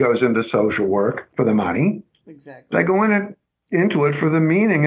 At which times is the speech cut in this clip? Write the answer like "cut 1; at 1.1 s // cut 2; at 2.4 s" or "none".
cut 1; at 1.2 s